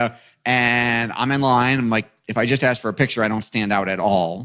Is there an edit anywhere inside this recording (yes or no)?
no